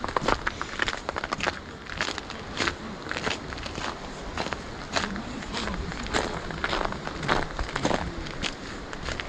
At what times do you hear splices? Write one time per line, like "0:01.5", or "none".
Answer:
none